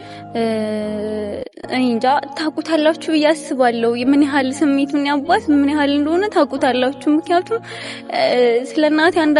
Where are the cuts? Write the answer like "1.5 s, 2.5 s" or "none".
7.1 s